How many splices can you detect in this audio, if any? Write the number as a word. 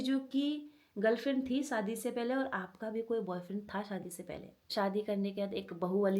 one